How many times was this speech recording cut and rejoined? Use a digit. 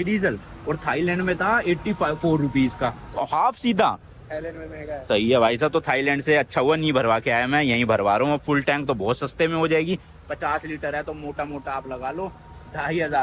0